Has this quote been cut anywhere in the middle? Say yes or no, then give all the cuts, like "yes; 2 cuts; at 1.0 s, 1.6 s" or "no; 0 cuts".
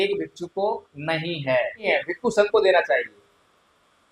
yes; 1 cut; at 1.9 s